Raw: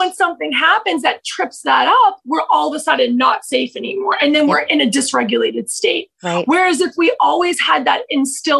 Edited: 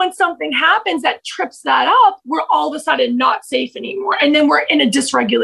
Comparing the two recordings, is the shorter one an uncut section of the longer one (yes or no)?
yes